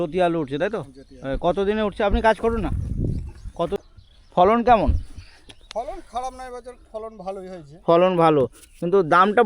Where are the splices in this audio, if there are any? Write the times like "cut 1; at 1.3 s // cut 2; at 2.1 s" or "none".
cut 1; at 3.8 s